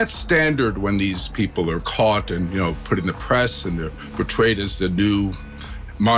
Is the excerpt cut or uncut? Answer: uncut